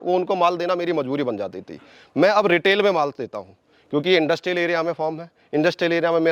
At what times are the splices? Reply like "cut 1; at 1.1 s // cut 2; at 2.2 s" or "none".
none